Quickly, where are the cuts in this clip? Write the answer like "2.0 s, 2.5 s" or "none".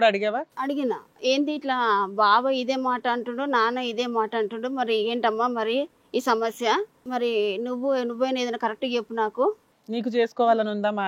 none

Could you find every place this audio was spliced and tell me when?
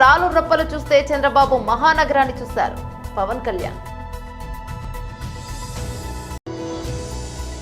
none

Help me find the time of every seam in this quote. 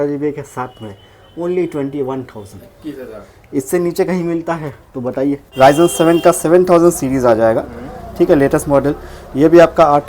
5.5 s

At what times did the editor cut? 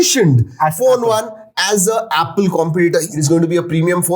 3.1 s

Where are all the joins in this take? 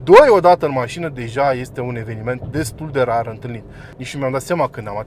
3.9 s

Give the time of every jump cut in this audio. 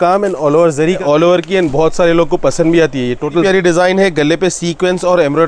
1.0 s, 3.4 s

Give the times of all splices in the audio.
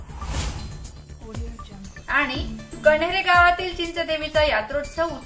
none

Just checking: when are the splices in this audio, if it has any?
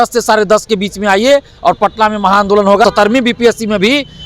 2.8 s

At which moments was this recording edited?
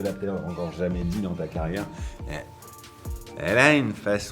none

